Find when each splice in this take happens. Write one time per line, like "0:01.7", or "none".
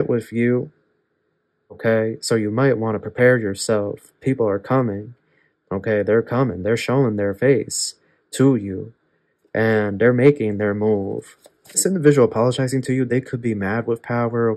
0:01.8
0:11.8